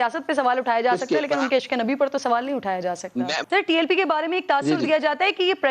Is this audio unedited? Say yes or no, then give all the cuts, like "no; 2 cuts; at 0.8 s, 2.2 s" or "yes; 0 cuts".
no; 1 cut; at 3.4 s